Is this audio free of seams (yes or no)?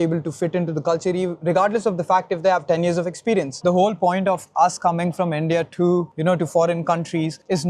no